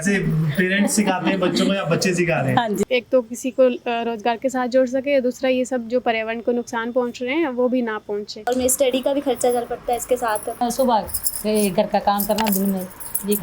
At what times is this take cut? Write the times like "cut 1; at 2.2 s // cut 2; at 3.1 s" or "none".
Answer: cut 1; at 2.8 s // cut 2; at 8.5 s // cut 3; at 10.6 s